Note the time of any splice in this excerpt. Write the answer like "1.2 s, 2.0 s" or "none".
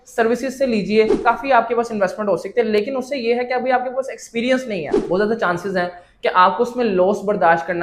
1.2 s